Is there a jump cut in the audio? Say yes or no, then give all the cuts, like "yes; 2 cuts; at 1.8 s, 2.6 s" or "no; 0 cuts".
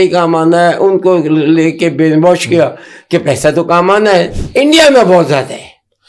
yes; 1 cut; at 4.4 s